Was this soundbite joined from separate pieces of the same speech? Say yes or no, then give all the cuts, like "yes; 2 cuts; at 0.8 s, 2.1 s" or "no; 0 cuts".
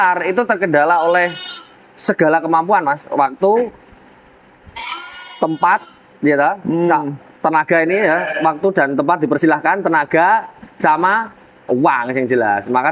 no; 0 cuts